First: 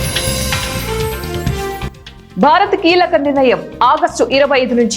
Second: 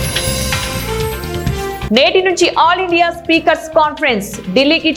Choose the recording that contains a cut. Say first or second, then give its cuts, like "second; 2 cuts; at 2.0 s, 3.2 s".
first; 1 cut; at 1.9 s